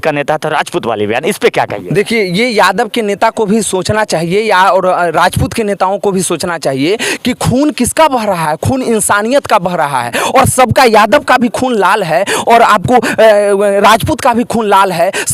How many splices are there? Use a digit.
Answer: 0